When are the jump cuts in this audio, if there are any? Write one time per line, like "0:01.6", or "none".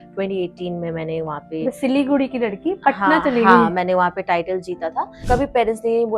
0:05.2